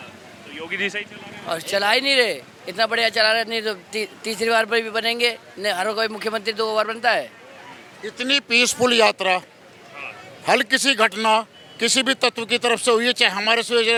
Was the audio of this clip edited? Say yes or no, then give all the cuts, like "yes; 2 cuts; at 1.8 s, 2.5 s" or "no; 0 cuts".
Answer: no; 0 cuts